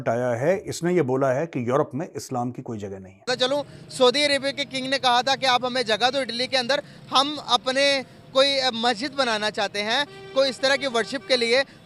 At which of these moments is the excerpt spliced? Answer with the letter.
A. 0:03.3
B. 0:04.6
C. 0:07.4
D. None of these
A